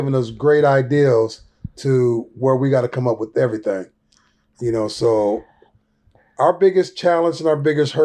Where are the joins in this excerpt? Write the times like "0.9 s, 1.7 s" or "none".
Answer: none